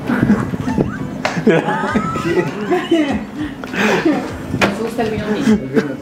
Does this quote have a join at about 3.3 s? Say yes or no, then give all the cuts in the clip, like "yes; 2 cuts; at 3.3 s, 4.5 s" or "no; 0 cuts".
no; 0 cuts